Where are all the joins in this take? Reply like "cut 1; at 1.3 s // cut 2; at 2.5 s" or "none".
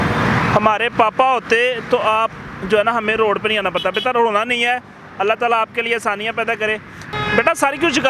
cut 1; at 7.0 s